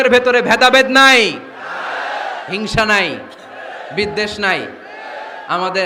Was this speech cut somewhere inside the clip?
no; 0 cuts

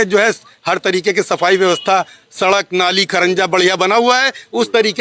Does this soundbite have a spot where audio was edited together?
no; 0 cuts

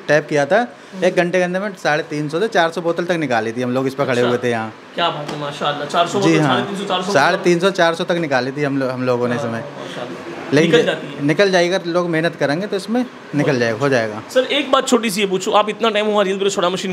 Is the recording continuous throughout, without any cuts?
yes; 0 cuts

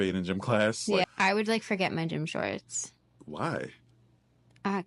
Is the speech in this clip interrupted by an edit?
yes; 1 cut; at 1.0 s

